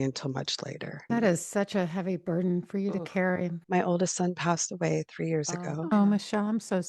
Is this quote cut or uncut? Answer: cut